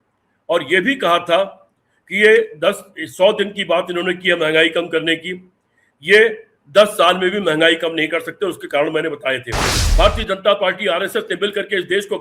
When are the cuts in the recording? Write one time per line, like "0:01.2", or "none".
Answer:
0:09.8